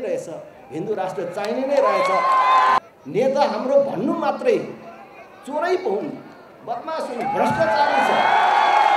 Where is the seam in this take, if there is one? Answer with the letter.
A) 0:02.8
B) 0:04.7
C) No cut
A